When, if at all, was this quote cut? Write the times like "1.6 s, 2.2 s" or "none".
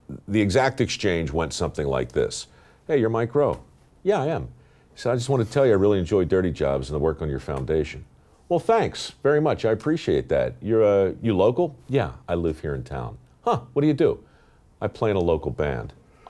none